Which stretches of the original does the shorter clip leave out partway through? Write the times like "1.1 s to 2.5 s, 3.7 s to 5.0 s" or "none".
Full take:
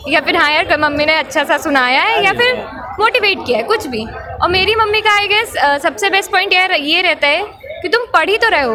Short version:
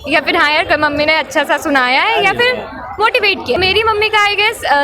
3.6 s to 4.5 s